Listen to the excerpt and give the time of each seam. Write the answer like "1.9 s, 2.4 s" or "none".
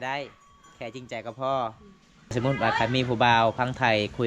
2.3 s